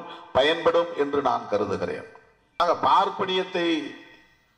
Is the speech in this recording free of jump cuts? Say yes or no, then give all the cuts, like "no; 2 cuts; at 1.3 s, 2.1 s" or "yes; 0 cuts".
no; 1 cut; at 2.6 s